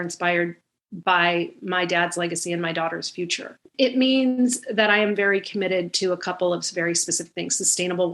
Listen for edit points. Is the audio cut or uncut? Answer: cut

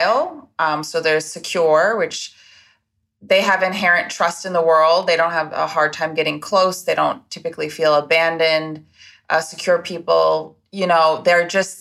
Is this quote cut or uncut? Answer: uncut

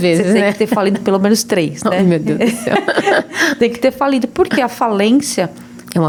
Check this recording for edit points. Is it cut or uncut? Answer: uncut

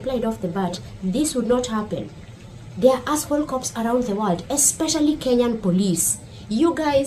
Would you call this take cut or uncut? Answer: uncut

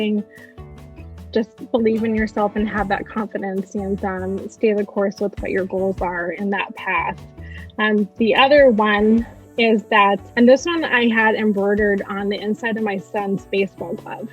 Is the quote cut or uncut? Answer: cut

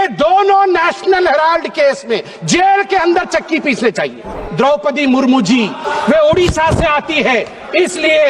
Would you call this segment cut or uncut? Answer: cut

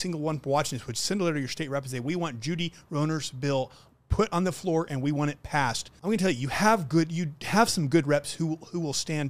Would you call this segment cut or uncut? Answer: cut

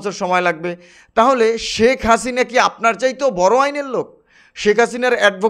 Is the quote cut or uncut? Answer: uncut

